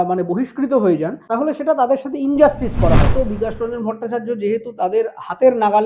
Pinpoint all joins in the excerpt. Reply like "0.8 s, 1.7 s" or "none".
1.2 s, 3.1 s